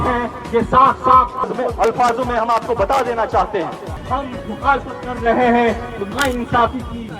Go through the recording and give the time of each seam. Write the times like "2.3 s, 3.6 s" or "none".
3.9 s